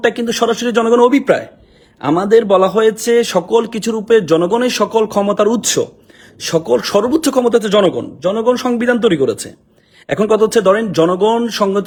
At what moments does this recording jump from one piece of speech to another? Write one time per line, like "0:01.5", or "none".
none